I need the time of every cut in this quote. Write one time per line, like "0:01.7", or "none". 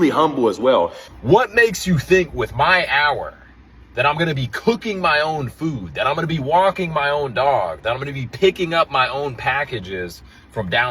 0:01.1